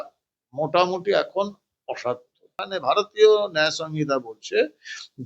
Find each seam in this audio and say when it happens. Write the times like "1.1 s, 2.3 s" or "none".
2.7 s